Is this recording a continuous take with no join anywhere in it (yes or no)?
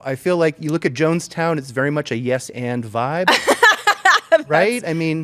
yes